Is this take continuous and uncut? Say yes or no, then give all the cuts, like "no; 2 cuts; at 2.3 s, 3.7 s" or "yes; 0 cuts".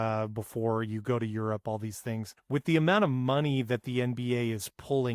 no; 1 cut; at 2.3 s